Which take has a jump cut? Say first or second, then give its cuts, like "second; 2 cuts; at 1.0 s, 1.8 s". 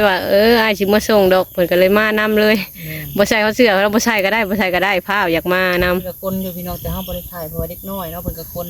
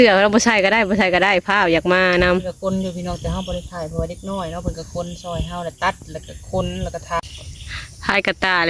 second; 1 cut; at 7.3 s